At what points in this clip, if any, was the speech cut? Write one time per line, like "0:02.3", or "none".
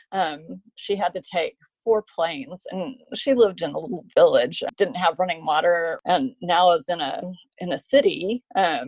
0:04.6
0:06.0

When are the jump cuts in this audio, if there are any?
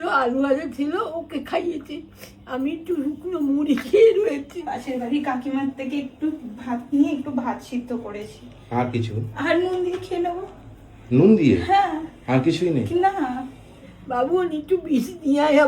0:04.7
0:14.0

